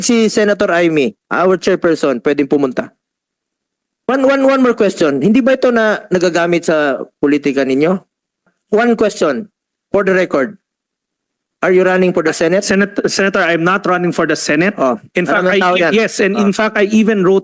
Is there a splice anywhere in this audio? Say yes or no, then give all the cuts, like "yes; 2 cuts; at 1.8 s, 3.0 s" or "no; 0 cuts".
yes; 2 cuts; at 4.1 s, 8.5 s